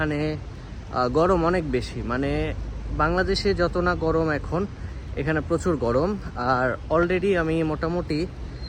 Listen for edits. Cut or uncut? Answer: uncut